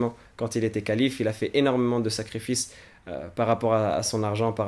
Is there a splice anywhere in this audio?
no; 0 cuts

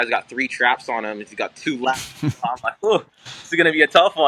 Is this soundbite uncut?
yes; 0 cuts

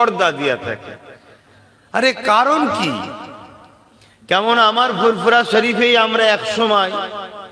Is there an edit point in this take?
no; 0 cuts

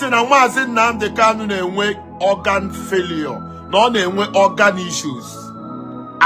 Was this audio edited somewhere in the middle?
no; 0 cuts

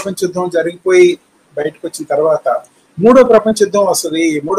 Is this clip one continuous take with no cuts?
yes; 0 cuts

